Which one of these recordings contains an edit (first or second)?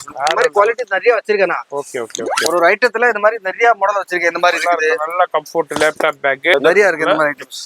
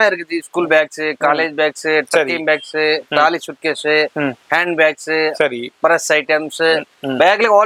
first